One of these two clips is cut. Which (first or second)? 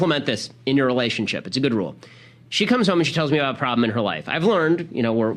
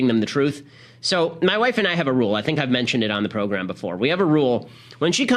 first